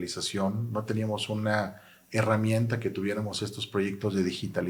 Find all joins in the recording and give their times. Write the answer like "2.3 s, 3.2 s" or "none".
none

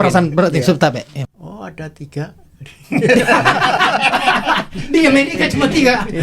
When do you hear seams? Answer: 1.2 s

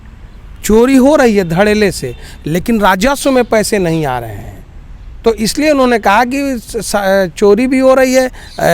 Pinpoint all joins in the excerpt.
none

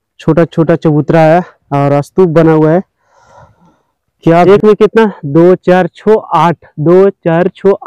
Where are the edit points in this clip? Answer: 4.5 s

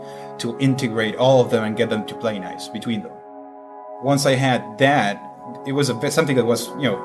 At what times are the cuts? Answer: 3.7 s

